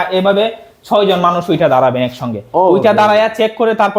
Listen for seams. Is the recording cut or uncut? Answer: uncut